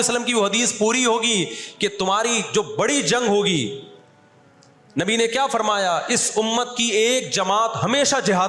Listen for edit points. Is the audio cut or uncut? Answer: uncut